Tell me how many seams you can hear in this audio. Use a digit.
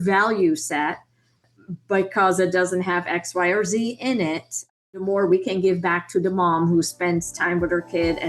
1